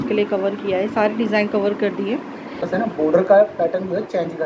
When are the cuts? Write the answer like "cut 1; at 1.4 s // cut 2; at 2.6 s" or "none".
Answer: cut 1; at 2.6 s

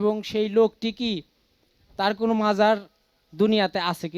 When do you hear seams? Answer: none

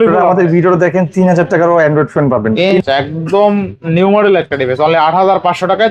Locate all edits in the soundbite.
cut 1; at 2.8 s

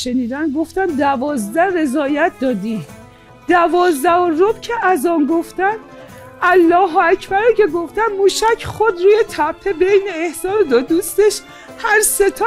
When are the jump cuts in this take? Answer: none

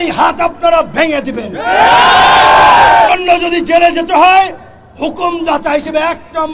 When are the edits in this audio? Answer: cut 1; at 3.1 s

